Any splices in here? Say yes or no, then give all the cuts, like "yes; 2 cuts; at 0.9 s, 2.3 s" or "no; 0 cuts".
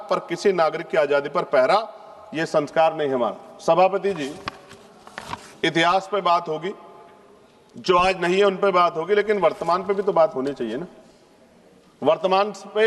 no; 0 cuts